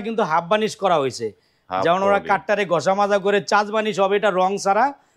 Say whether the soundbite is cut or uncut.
uncut